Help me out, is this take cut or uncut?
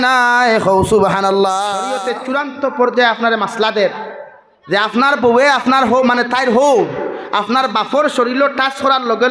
cut